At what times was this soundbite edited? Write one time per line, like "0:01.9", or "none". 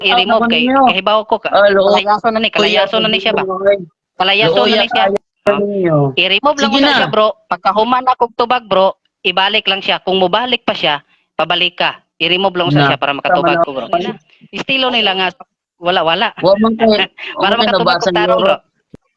none